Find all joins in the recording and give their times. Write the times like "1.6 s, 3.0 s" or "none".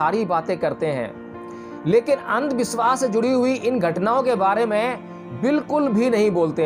none